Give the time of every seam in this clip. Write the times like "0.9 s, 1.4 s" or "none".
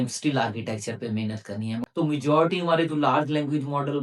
1.8 s